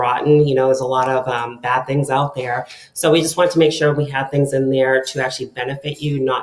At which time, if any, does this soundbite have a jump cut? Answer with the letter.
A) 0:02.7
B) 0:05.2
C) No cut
C